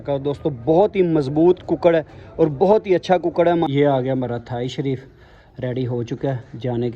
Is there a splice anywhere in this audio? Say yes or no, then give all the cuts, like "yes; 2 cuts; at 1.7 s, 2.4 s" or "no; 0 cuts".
yes; 1 cut; at 3.7 s